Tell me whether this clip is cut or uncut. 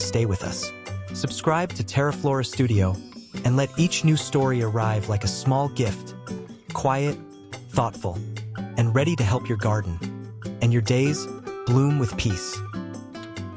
cut